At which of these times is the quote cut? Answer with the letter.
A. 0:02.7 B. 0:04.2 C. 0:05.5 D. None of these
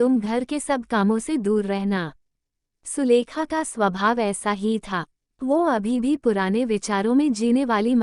A